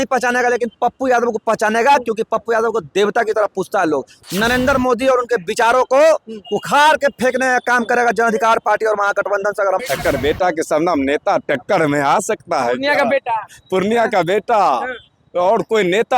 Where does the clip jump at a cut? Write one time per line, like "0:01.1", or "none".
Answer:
0:04.2
0:09.8